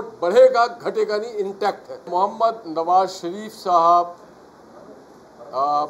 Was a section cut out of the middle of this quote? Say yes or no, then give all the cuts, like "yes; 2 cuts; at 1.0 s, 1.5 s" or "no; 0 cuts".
yes; 1 cut; at 2.1 s